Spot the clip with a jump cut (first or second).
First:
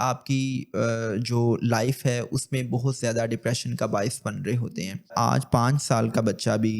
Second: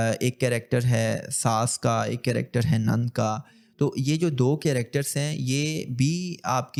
first